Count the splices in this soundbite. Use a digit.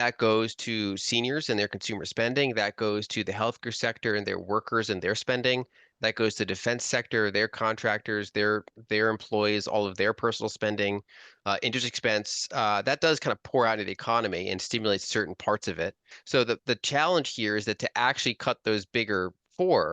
1